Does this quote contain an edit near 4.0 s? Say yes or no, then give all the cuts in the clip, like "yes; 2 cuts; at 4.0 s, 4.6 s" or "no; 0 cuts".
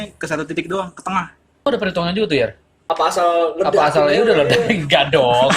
no; 2 cuts; at 1.7 s, 2.7 s